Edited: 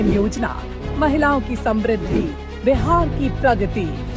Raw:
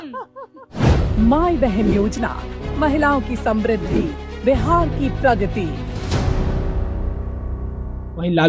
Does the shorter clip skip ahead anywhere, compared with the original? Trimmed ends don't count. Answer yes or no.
no